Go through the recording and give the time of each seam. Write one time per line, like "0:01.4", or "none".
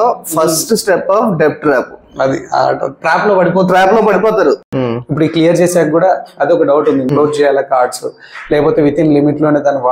0:04.7
0:07.0